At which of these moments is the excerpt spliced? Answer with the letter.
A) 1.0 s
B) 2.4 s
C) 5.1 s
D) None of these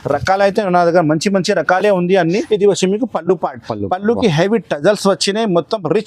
B